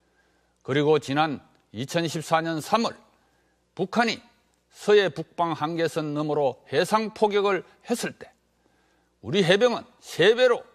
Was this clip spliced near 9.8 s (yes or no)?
yes